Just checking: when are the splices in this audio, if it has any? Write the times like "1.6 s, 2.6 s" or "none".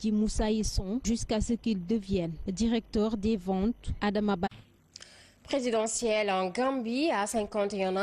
none